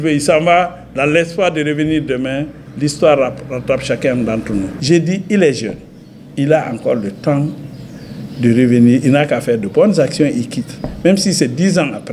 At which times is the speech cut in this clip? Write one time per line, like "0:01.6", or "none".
0:04.7